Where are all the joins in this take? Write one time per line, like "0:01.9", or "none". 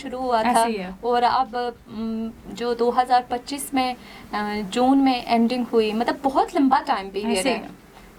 none

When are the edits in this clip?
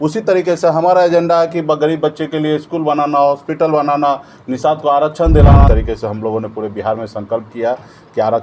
0:05.7

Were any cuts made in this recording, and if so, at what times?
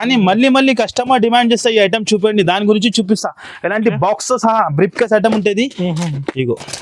none

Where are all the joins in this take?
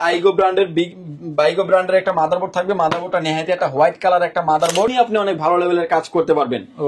0:04.9

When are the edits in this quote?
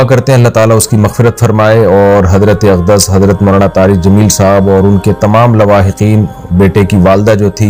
none

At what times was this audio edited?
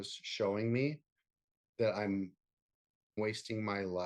0:03.2

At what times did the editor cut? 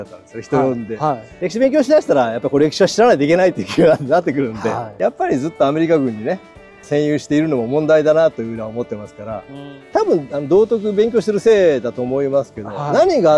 0:01.3
0:04.9
0:09.7

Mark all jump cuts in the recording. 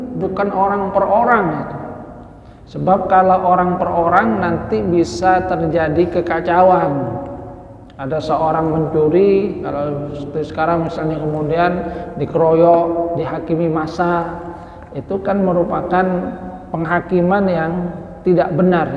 none

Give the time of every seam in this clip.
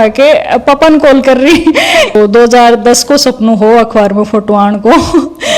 0:02.1

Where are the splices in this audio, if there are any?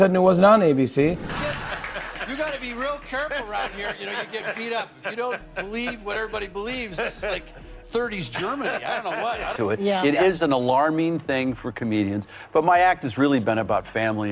0:01.3
0:09.5

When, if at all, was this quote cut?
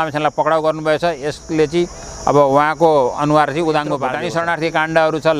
0:04.2

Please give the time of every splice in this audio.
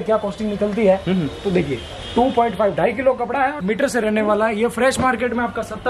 0:03.6

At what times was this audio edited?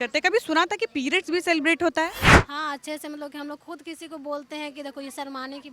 0:02.3

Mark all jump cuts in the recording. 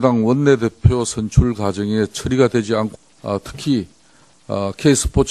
none

